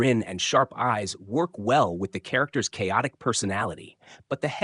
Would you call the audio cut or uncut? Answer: uncut